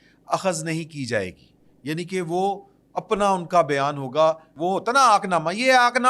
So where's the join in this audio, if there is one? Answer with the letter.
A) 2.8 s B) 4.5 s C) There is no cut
B